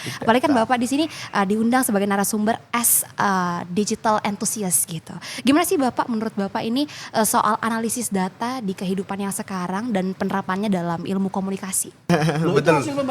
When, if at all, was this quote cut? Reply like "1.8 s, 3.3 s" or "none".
12.1 s